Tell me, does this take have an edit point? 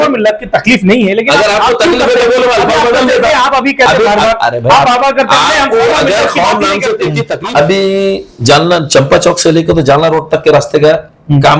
yes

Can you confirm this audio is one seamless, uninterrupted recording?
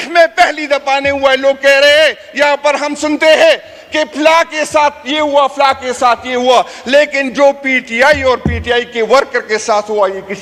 yes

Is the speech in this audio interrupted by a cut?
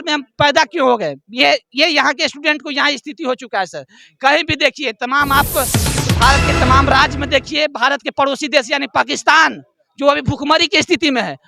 no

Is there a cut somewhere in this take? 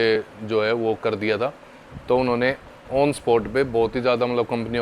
no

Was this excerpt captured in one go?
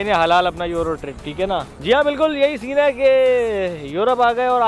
yes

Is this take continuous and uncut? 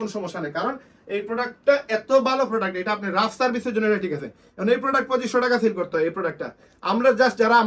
yes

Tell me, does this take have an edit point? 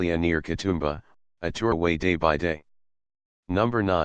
no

